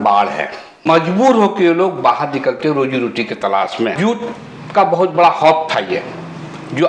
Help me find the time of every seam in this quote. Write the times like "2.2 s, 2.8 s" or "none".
1.0 s, 4.0 s

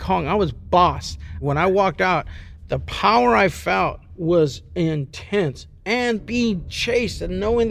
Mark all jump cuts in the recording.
1.3 s, 4.1 s, 6.2 s

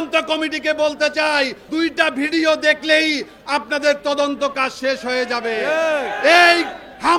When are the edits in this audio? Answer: 1.6 s

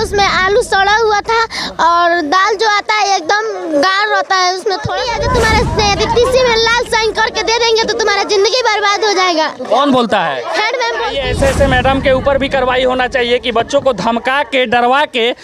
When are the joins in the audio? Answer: 5.0 s, 11.1 s

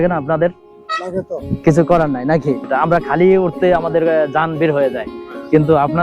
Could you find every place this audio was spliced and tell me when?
1.4 s, 2.7 s

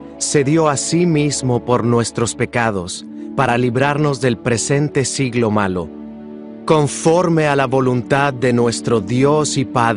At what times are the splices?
3.3 s

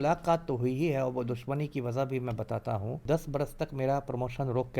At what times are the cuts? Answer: 3.0 s

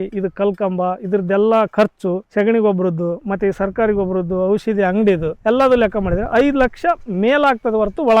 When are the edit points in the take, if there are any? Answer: 2.2 s, 5.3 s

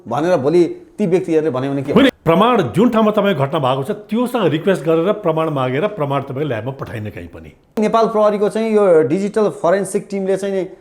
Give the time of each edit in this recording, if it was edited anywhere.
2.1 s, 7.8 s

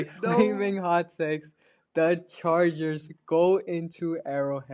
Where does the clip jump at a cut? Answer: none

